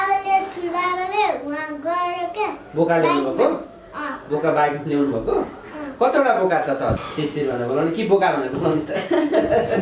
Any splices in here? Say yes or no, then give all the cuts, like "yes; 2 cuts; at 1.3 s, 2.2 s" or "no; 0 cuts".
yes; 1 cut; at 7.0 s